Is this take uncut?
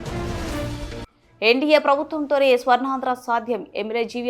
no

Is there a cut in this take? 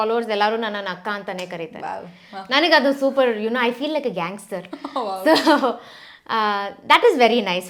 no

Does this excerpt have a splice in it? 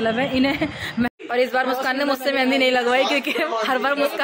yes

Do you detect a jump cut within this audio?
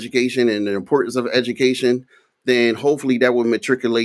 no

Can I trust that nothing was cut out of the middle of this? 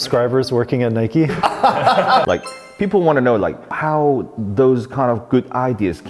no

